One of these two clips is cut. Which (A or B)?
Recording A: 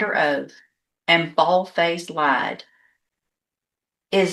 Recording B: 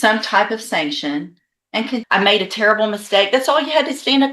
B